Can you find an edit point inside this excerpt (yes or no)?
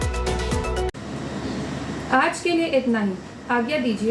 no